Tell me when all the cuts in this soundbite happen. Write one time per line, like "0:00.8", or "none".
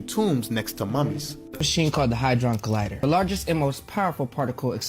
0:01.6